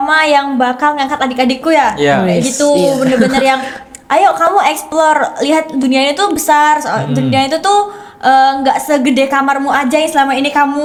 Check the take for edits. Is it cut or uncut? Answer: uncut